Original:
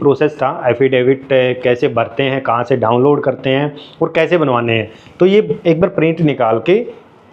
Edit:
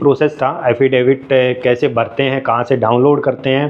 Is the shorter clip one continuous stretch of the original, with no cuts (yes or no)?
yes